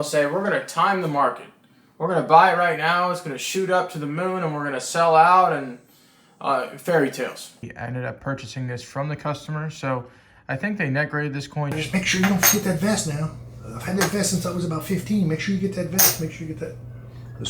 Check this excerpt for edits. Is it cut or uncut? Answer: cut